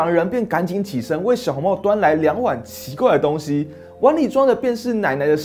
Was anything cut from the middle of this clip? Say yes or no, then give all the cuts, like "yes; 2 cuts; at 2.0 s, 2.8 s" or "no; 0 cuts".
no; 0 cuts